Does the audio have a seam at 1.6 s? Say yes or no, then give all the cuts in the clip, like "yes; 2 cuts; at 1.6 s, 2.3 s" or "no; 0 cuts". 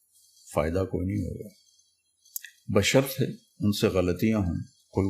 no; 0 cuts